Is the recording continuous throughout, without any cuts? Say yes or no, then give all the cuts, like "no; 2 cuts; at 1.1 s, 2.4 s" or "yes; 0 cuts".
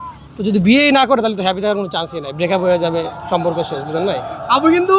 yes; 0 cuts